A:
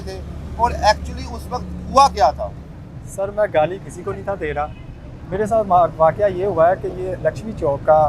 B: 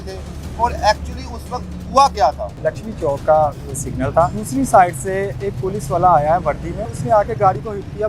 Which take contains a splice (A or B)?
B